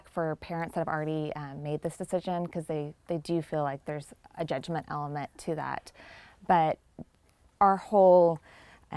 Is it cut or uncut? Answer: uncut